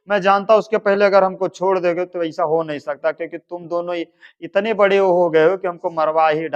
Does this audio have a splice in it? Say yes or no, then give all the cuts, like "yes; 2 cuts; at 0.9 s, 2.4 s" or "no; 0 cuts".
no; 0 cuts